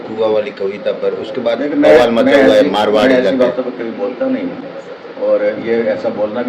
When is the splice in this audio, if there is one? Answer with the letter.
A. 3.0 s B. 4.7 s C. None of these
C